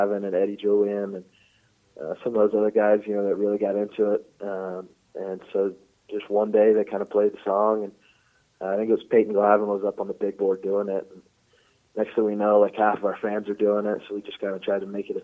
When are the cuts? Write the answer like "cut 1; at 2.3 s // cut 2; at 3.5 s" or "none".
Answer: none